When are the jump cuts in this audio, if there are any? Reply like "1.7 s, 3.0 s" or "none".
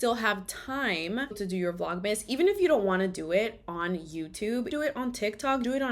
1.4 s

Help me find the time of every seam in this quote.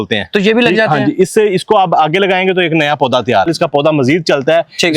3.5 s

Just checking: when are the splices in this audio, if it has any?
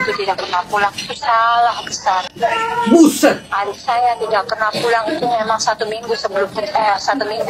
none

